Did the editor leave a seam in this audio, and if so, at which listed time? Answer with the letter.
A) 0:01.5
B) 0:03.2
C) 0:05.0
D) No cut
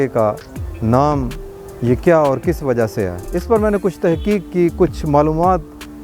B